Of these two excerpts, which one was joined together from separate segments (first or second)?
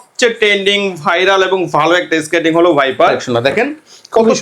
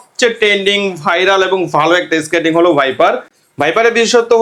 first